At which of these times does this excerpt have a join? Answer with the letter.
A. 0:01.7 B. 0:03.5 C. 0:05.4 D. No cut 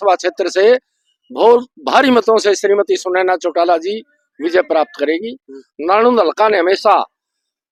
D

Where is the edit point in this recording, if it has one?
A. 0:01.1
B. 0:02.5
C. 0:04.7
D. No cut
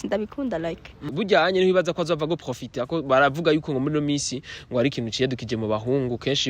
A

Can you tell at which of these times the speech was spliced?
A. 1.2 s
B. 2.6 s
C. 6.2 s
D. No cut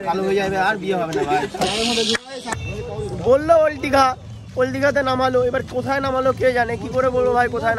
B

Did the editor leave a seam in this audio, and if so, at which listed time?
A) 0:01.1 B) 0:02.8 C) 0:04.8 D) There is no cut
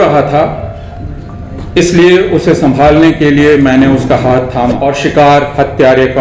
C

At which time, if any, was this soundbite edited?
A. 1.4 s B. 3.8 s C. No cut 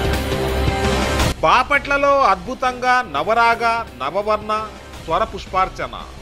A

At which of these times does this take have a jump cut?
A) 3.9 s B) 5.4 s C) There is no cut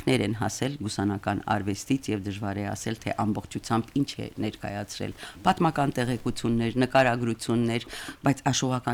C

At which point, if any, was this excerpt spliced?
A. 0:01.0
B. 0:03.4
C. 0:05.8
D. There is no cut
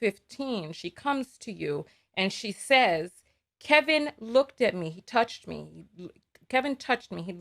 D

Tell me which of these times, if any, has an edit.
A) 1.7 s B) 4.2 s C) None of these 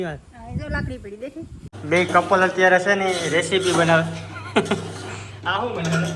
A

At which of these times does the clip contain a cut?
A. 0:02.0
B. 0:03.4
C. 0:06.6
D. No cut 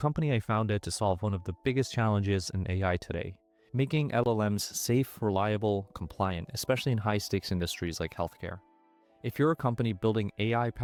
D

